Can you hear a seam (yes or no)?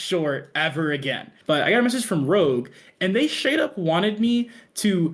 yes